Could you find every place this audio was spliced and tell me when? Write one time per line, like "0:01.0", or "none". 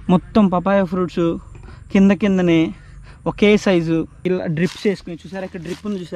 0:04.1